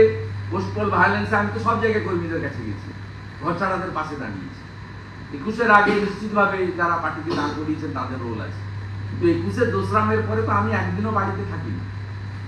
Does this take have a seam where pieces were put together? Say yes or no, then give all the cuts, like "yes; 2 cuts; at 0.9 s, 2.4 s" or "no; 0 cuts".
no; 0 cuts